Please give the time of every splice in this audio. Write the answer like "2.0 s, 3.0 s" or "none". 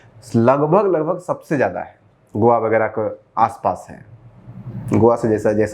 none